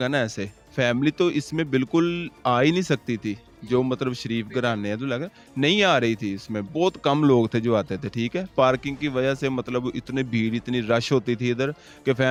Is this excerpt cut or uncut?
uncut